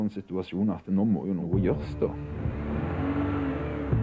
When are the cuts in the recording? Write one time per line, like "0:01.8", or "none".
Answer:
0:01.4